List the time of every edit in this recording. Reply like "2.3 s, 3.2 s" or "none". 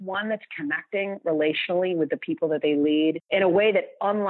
3.2 s